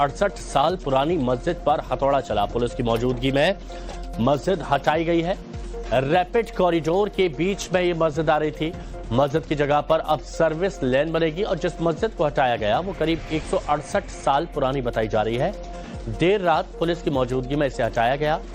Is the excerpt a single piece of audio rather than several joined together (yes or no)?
no